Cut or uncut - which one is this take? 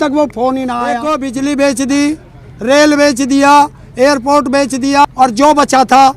cut